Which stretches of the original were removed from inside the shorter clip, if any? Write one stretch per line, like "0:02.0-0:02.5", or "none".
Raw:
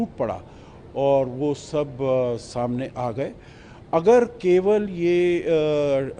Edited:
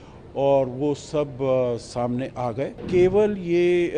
0:03.4-0:04.4